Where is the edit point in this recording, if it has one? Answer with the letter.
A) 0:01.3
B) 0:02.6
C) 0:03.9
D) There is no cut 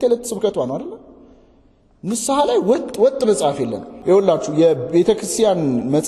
C